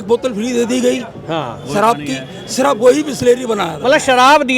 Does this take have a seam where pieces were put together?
no; 0 cuts

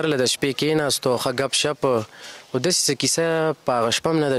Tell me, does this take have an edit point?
no; 0 cuts

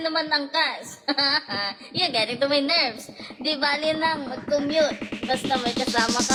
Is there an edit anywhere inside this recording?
no; 0 cuts

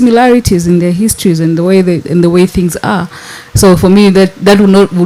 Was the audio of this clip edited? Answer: no; 0 cuts

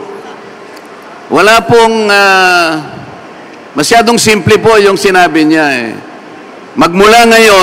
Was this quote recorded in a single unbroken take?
yes; 0 cuts

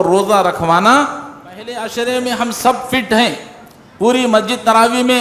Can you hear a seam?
yes; 1 cut; at 1.8 s

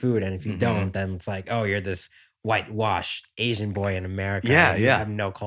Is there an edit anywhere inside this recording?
no; 0 cuts

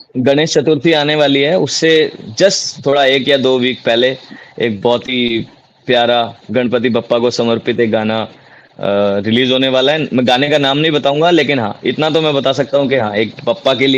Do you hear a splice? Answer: no; 0 cuts

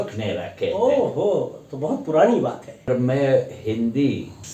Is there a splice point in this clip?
yes; 1 cut; at 2.9 s

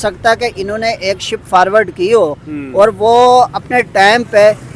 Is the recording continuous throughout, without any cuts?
yes; 0 cuts

